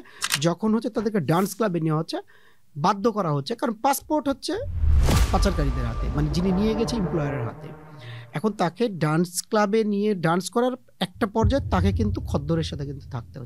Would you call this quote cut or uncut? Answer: uncut